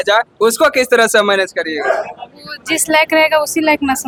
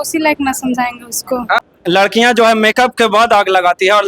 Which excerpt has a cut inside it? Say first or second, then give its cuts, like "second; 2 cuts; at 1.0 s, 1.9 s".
second; 1 cut; at 1.6 s